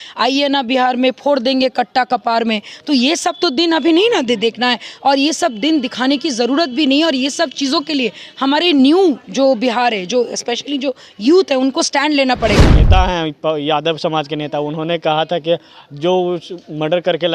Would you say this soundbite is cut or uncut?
cut